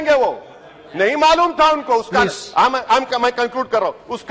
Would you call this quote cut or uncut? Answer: uncut